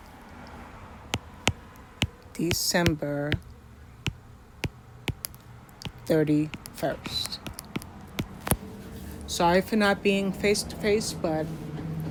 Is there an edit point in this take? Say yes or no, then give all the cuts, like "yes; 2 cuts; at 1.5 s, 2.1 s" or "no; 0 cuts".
no; 0 cuts